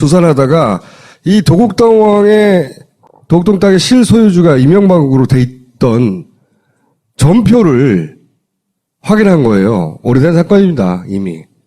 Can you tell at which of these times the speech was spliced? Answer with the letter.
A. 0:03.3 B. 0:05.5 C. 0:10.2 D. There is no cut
C